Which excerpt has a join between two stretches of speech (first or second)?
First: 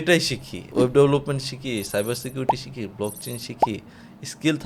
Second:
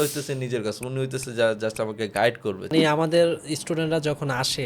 second